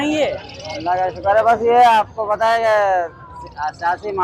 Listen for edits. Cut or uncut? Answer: uncut